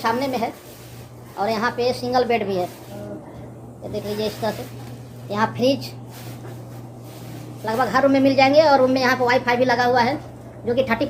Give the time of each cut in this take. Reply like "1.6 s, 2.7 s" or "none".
none